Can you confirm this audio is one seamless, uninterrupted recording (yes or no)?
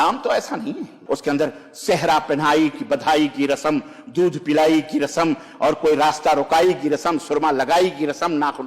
no